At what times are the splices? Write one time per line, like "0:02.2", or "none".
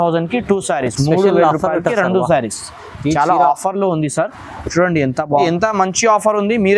0:05.4